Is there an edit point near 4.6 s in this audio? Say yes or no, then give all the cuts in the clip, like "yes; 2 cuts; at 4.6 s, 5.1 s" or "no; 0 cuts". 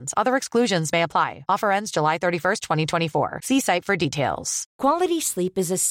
yes; 1 cut; at 4.6 s